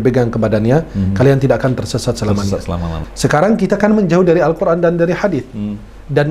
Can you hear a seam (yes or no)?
yes